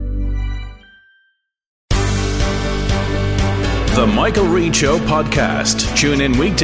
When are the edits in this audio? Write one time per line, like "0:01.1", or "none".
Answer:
0:01.8